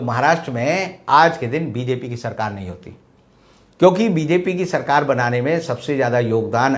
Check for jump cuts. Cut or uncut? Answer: uncut